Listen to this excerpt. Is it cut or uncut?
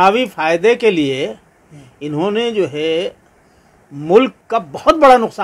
cut